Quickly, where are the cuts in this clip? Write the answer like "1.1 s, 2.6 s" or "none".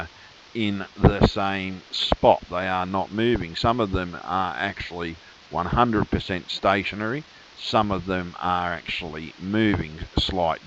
2.9 s